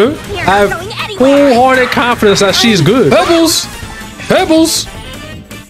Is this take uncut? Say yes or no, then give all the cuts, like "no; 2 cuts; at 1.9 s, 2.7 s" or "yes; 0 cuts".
no; 1 cut; at 3.1 s